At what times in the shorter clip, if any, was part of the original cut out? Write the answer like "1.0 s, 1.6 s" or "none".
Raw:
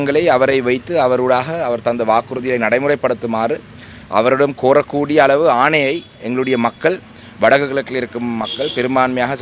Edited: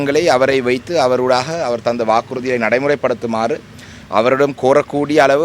none